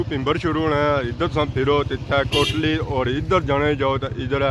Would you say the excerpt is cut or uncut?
uncut